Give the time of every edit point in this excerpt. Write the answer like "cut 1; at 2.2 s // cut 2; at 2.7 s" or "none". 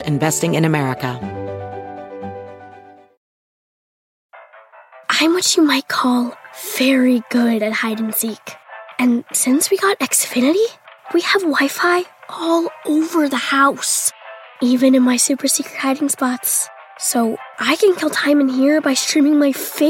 cut 1; at 1.2 s